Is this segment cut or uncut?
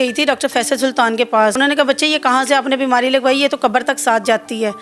cut